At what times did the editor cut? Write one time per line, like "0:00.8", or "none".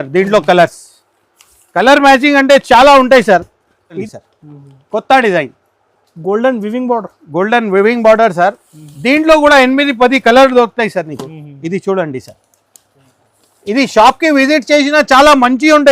0:04.0